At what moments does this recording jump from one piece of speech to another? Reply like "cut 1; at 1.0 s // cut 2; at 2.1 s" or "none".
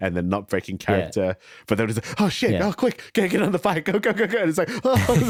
none